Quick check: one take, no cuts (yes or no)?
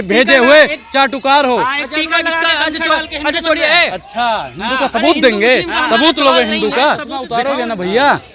no